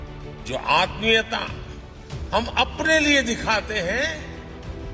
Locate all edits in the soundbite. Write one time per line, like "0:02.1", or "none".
none